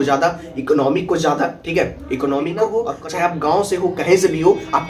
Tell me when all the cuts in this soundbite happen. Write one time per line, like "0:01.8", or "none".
0:02.9